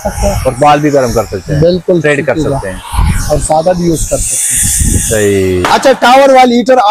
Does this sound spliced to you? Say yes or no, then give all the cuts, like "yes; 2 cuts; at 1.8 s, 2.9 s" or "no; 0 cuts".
yes; 1 cut; at 5.6 s